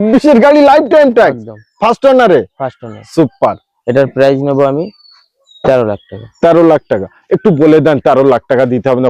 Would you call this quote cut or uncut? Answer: uncut